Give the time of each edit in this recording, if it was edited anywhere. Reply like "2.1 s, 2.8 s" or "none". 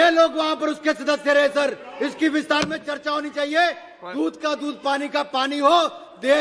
none